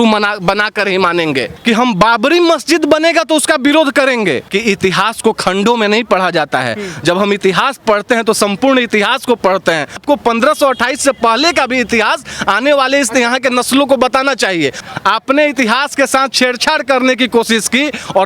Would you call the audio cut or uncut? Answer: cut